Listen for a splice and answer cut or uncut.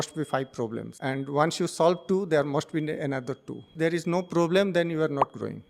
cut